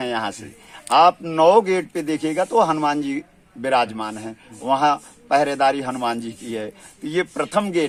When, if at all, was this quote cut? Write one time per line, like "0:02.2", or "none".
none